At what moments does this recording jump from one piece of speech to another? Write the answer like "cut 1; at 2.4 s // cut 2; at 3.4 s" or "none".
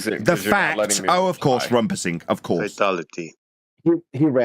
cut 1; at 2.7 s